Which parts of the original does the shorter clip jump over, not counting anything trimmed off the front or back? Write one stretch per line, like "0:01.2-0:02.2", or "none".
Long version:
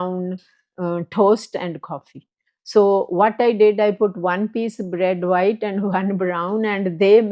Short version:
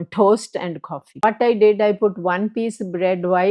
0:02.2-0:03.2